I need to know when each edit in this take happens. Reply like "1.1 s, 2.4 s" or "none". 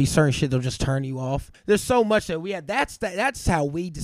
1.7 s